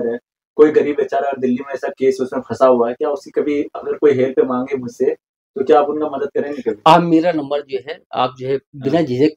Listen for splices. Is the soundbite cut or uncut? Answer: uncut